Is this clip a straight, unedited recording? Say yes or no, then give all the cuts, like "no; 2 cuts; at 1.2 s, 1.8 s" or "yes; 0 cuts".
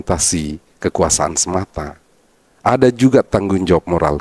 yes; 0 cuts